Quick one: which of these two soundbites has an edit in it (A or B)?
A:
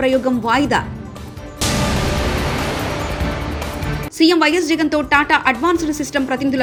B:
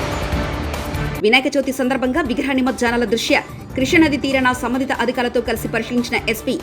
B